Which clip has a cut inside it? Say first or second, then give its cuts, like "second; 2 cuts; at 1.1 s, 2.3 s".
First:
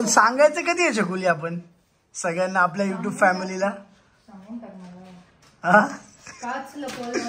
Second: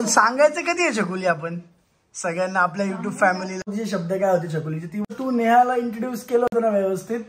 second; 2 cuts; at 3.6 s, 5.1 s